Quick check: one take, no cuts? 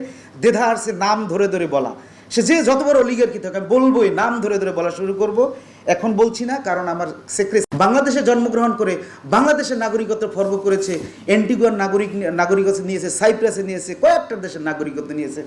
no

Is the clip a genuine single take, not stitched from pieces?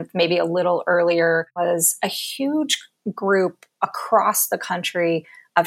no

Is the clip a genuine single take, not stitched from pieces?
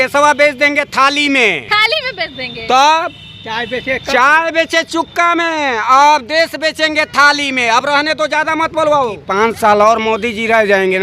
no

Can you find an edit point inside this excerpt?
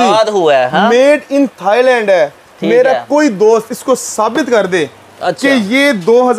no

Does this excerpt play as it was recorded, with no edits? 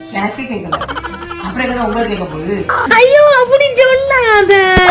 yes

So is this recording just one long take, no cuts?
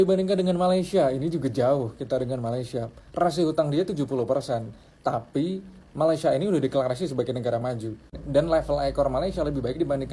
yes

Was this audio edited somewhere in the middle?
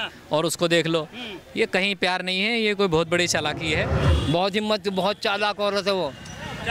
yes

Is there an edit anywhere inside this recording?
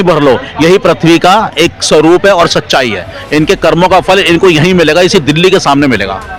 no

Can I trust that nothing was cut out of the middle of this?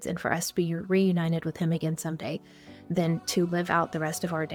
yes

